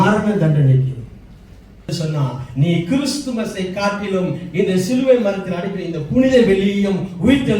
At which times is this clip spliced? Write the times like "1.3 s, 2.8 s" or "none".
1.9 s